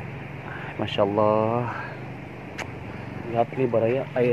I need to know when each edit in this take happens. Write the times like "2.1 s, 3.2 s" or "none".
3.3 s